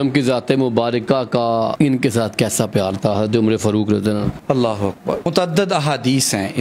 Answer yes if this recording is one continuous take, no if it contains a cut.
yes